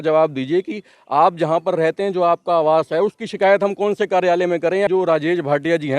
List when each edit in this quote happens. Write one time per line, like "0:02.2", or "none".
0:04.9